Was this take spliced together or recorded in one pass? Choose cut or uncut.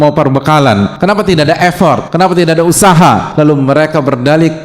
cut